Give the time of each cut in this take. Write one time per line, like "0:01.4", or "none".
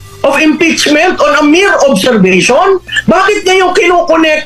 0:02.9

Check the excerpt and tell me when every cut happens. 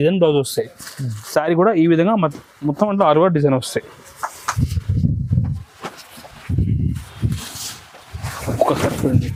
none

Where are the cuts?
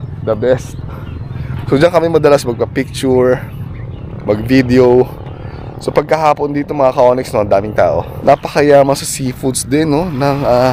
0:08.1

